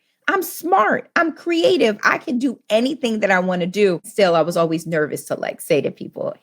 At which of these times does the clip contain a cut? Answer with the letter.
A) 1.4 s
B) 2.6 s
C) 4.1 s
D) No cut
C